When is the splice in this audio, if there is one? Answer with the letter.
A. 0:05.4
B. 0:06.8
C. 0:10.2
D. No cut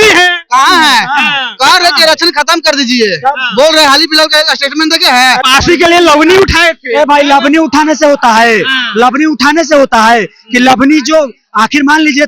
A